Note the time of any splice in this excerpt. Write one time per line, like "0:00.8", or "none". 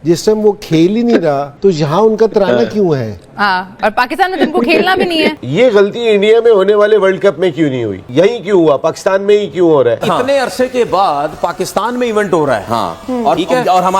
0:05.4
0:08.0
0:10.0